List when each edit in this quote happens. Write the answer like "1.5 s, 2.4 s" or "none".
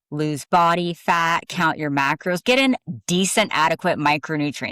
2.4 s